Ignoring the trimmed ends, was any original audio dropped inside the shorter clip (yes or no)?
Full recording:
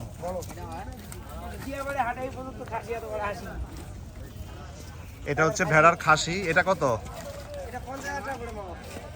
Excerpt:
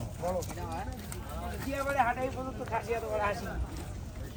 no